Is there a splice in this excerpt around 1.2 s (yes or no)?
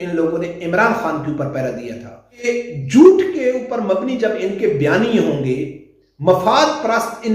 no